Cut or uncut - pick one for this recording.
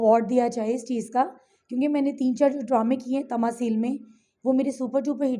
uncut